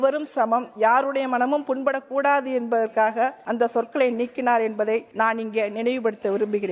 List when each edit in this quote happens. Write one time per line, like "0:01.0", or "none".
0:03.4
0:05.1